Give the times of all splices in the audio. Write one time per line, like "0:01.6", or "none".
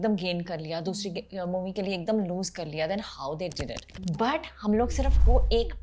0:03.9